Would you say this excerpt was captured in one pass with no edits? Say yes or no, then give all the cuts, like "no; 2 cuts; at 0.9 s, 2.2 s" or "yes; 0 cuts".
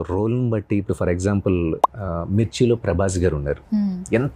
yes; 0 cuts